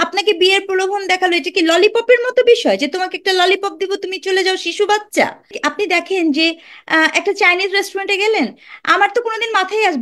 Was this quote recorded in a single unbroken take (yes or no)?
no